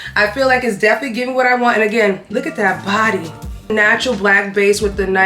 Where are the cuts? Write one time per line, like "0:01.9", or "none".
0:03.7

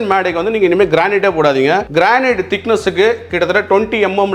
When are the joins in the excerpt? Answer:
none

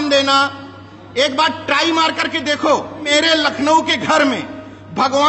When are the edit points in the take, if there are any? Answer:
none

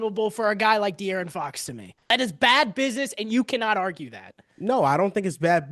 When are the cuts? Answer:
0:02.1

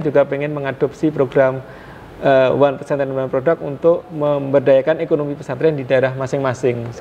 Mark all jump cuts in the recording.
none

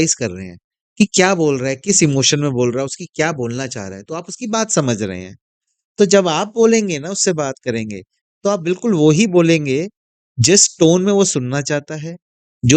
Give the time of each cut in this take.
none

